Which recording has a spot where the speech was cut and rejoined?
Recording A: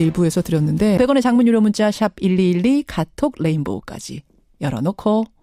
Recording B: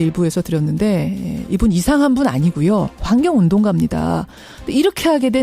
B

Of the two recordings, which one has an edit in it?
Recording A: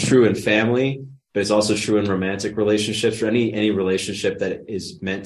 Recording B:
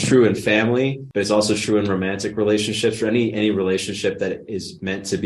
B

